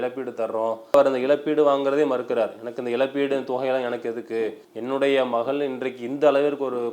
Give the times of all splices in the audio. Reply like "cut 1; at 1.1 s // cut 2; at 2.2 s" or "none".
cut 1; at 0.9 s // cut 2; at 4.7 s